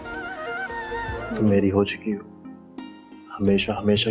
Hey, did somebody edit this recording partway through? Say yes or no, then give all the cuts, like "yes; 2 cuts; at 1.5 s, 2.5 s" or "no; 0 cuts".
yes; 1 cut; at 1.2 s